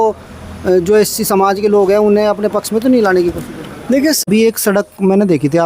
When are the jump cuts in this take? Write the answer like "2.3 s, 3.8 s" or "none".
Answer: 4.2 s